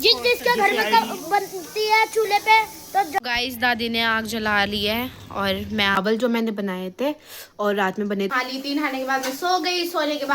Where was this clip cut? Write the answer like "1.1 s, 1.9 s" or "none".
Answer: 3.2 s, 6.0 s, 8.3 s